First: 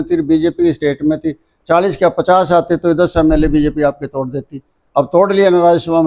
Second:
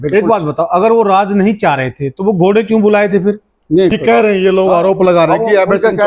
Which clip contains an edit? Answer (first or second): second